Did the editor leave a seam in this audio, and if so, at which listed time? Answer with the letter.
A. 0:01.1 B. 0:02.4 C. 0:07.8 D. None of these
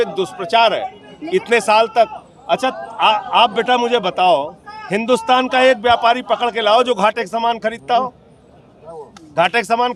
D